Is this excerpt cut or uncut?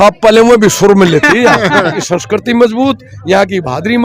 cut